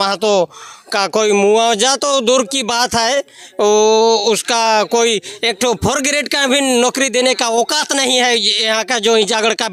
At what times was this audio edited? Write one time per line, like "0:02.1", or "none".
none